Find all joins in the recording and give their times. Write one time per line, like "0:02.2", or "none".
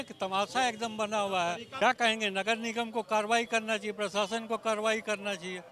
0:01.7